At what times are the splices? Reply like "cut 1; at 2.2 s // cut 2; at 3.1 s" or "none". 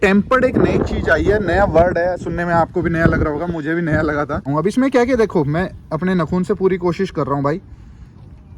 cut 1; at 4.4 s